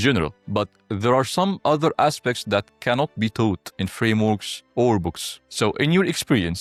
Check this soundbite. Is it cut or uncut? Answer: uncut